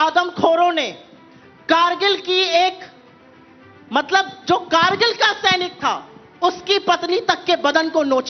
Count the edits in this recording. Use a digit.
0